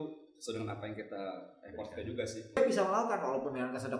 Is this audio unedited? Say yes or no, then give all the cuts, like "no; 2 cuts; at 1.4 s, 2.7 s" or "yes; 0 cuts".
no; 1 cut; at 2.6 s